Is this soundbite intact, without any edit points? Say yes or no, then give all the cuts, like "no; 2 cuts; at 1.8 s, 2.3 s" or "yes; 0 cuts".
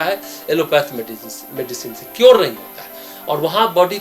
yes; 0 cuts